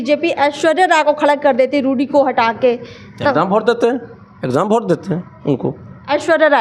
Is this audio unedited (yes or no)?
yes